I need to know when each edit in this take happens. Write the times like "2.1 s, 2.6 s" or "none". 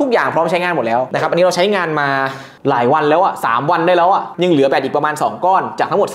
1.1 s